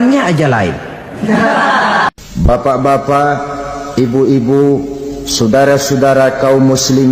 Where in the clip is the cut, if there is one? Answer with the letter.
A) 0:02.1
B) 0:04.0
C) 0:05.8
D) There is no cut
A